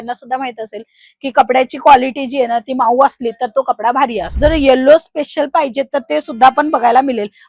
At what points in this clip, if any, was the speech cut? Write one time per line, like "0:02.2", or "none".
0:04.3